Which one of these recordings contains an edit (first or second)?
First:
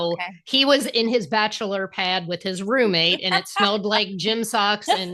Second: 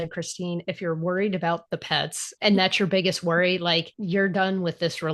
second